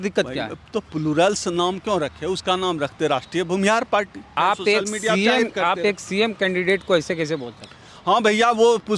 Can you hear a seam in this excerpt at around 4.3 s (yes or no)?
yes